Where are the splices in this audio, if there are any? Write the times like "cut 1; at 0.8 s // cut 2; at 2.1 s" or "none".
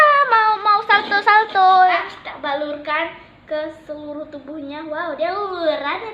cut 1; at 2.0 s